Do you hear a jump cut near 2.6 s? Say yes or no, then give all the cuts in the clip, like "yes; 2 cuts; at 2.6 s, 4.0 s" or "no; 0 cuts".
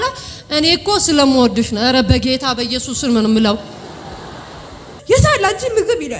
no; 1 cut; at 4.9 s